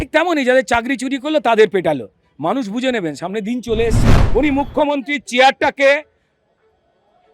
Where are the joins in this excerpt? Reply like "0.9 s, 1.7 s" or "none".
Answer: 4.1 s